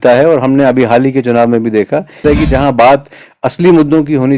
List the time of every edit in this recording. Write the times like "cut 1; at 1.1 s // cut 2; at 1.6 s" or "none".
cut 1; at 2.2 s